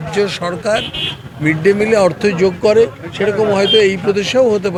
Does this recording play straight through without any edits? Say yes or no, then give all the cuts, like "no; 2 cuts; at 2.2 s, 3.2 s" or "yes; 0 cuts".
yes; 0 cuts